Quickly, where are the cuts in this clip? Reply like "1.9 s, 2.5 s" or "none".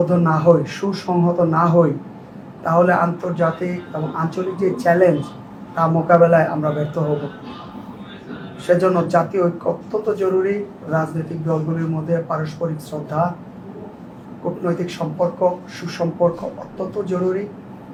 none